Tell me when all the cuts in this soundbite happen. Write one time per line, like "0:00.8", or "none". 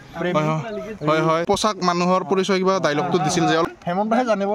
0:01.4
0:03.6